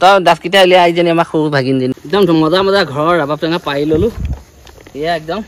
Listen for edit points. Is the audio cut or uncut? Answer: cut